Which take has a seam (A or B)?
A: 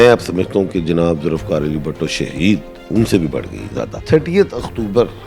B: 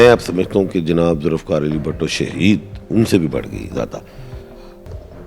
A